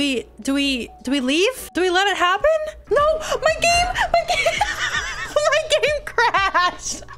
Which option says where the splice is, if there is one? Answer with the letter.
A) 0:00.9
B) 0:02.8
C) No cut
B